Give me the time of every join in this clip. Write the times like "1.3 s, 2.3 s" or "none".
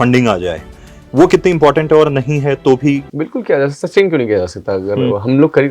3.1 s

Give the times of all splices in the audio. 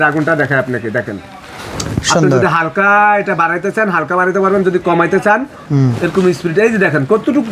5.6 s

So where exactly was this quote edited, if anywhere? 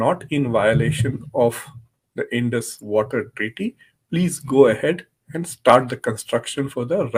none

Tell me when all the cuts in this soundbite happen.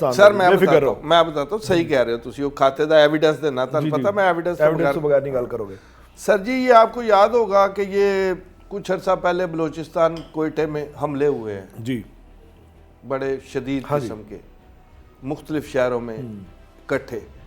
none

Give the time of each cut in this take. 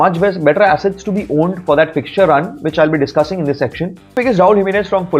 4.1 s

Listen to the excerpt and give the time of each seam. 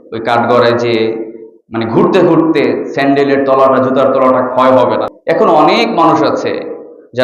5.1 s

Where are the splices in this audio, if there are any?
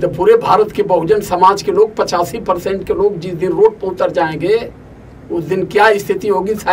none

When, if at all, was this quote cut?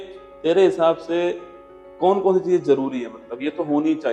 none

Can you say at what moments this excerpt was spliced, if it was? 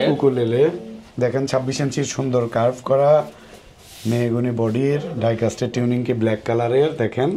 none

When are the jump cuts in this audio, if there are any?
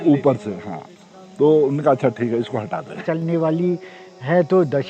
3.0 s

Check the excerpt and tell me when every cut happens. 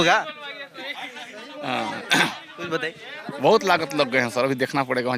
none

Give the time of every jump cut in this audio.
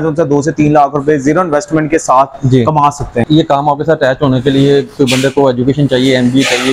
3.2 s

